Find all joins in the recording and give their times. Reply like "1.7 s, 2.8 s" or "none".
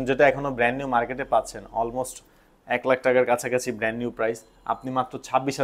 none